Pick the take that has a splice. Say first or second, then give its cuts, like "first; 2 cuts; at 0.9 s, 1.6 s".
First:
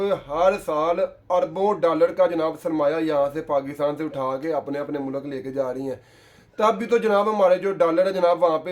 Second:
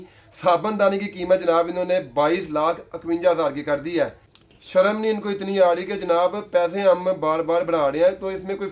second; 1 cut; at 4.4 s